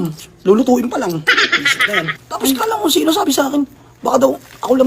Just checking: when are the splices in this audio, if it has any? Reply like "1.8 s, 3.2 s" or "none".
2.2 s